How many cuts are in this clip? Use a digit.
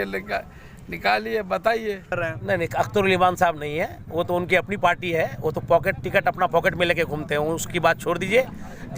1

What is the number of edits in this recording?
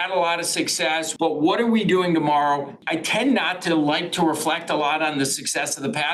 2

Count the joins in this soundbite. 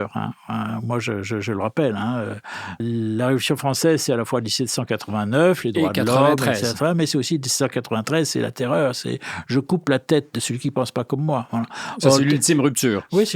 1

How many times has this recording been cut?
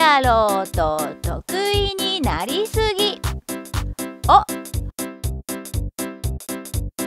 0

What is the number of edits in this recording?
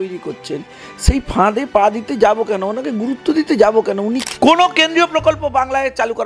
1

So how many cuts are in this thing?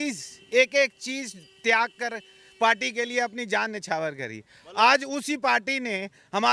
0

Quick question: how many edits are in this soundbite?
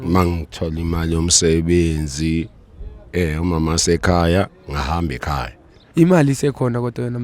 1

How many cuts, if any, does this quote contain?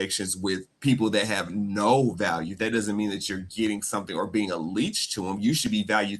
0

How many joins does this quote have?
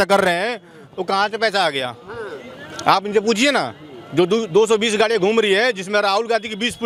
0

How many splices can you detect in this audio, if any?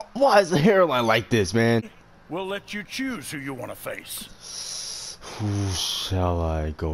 1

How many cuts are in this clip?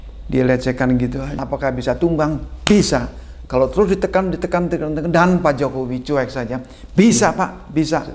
1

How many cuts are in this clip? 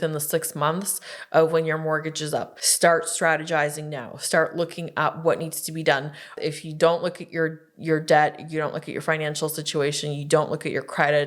2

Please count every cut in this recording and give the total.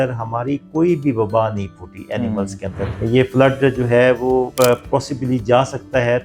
2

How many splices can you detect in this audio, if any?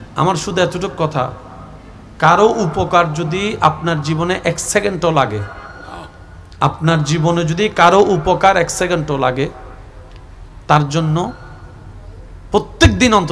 0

